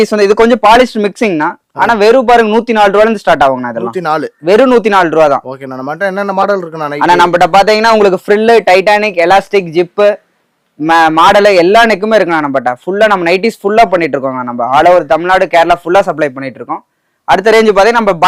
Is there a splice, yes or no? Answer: no